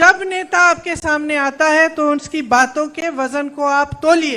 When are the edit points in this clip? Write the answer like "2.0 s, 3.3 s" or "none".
none